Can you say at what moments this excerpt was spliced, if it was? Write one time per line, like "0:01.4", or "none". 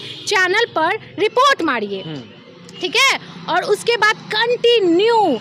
none